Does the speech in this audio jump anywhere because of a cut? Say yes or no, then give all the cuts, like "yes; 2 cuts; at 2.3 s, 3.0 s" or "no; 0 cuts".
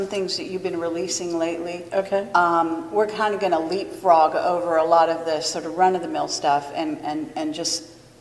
yes; 1 cut; at 5.5 s